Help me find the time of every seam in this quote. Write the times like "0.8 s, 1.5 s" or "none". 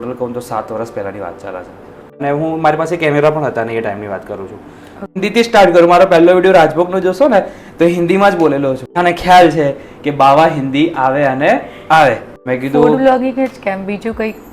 2.2 s, 5.2 s, 8.9 s, 12.3 s